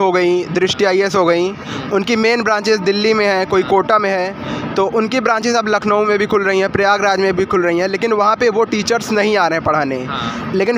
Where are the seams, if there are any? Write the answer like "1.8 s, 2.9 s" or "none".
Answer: none